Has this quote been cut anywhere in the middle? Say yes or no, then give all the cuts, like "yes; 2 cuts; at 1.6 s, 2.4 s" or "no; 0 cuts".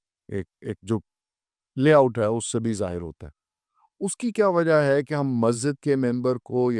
no; 0 cuts